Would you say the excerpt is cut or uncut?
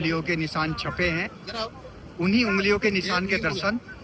uncut